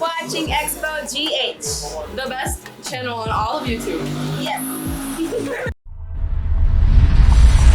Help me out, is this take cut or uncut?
uncut